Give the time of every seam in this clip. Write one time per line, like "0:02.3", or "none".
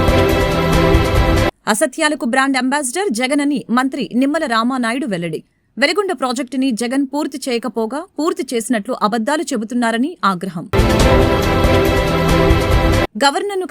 0:01.5